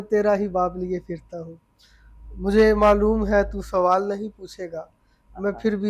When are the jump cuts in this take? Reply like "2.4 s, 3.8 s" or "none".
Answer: none